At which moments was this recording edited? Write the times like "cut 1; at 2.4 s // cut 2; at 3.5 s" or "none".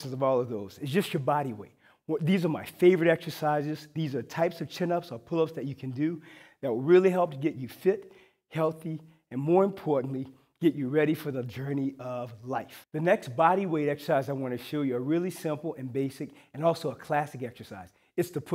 none